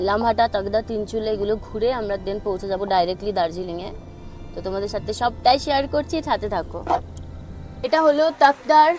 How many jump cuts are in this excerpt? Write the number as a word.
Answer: zero